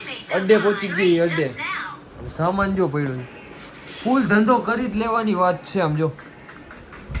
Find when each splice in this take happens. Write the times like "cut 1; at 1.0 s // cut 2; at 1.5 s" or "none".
none